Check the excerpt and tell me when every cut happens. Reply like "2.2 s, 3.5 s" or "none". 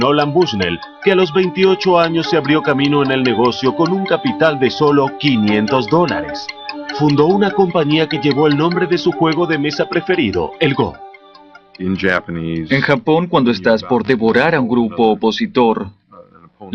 7.7 s